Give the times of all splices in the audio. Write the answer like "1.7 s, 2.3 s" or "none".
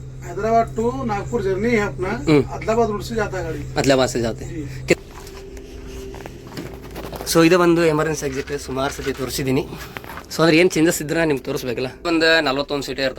4.9 s, 12.0 s